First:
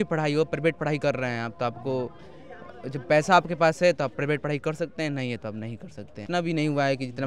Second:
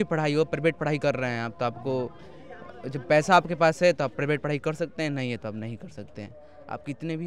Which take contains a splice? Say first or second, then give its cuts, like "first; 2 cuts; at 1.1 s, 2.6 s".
first; 1 cut; at 6.2 s